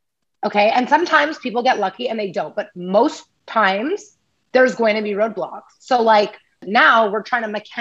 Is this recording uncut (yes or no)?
no